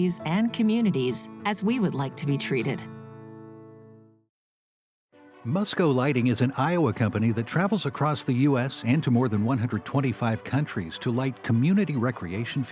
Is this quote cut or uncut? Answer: uncut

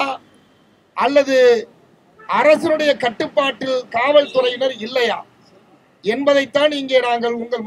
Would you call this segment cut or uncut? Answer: uncut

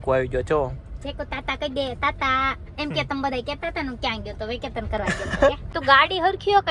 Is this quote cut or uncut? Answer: cut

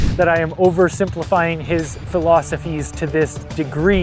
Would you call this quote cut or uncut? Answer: uncut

